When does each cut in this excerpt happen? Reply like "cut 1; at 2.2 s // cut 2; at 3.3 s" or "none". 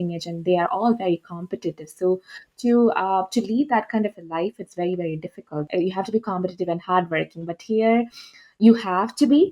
cut 1; at 5.6 s